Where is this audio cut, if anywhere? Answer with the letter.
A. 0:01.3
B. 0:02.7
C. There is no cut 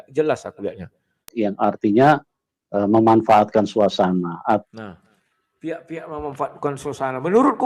A